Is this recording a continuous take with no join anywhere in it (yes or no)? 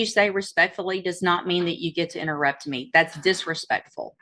yes